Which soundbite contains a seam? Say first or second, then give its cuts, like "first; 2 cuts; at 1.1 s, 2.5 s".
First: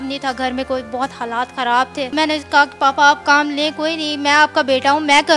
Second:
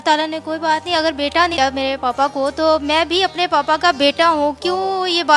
second; 1 cut; at 1.5 s